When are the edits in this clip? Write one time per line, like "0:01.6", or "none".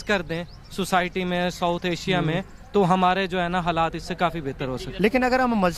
0:04.9